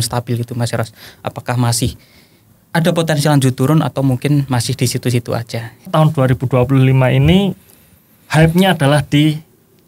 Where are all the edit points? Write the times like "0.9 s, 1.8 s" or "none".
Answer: 5.9 s